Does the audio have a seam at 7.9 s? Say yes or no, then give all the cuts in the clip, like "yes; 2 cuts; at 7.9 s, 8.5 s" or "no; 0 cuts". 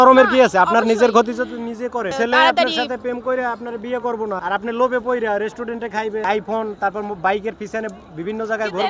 no; 3 cuts; at 2.1 s, 4.4 s, 6.2 s